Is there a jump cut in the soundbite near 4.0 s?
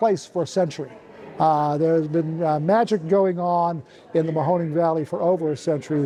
no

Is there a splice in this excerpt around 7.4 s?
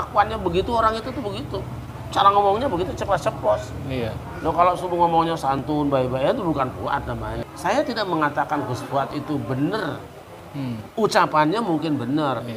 yes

